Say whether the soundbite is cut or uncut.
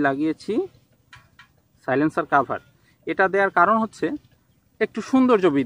uncut